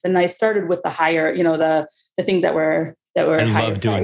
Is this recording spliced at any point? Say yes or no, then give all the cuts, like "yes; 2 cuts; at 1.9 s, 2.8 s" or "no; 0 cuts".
yes; 1 cut; at 3.0 s